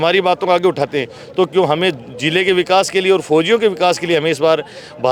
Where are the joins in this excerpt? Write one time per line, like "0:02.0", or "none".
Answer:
none